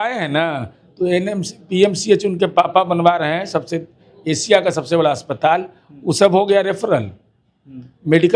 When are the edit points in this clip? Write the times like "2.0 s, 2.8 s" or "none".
none